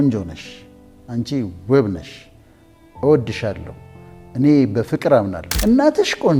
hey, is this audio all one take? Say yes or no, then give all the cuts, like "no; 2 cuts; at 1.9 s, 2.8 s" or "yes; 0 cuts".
no; 1 cut; at 5.4 s